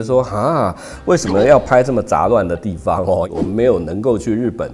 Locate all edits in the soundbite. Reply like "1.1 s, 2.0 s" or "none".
3.2 s